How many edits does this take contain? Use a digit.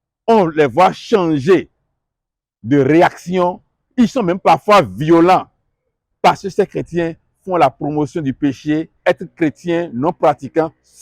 1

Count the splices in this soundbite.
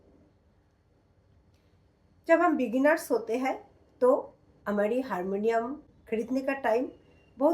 1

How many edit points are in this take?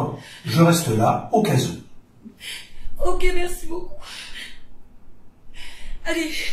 0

